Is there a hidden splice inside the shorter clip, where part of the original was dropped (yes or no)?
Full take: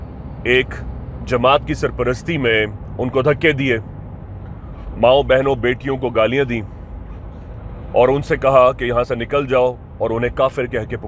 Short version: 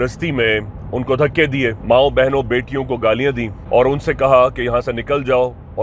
yes